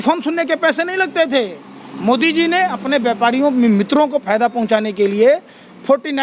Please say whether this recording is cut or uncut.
uncut